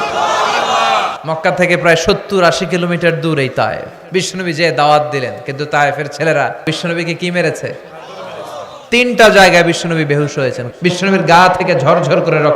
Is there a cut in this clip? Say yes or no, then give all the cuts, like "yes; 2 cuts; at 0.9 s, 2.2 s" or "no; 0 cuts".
yes; 4 cuts; at 1.1 s, 3.9 s, 6.6 s, 10.6 s